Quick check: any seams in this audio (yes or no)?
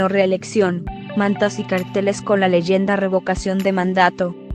no